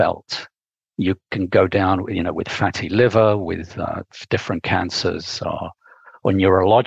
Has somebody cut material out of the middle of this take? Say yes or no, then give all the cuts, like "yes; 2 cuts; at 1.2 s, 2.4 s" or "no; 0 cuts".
no; 0 cuts